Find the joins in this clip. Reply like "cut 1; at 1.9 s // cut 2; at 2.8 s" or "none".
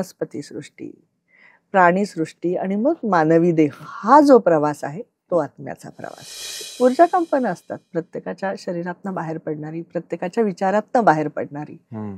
cut 1; at 6.7 s